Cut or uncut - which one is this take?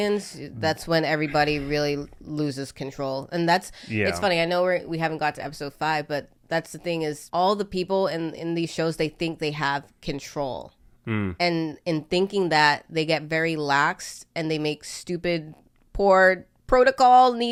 uncut